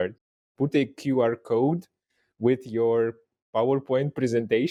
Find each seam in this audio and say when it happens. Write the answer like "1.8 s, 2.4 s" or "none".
none